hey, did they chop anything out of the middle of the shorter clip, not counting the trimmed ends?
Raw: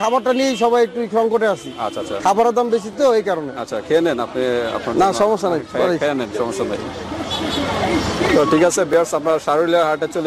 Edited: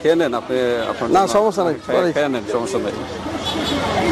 no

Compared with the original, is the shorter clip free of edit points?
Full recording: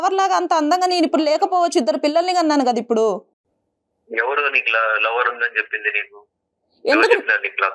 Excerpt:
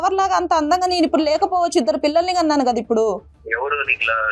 no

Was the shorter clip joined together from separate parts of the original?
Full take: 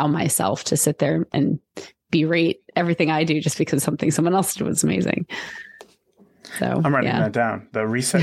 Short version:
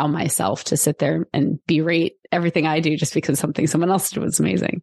yes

